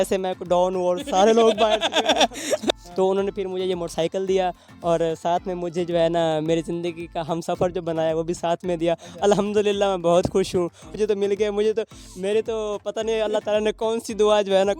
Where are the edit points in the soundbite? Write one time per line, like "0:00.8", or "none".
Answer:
0:02.7
0:10.9